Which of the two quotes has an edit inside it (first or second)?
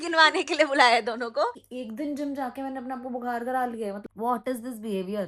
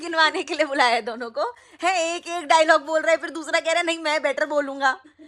first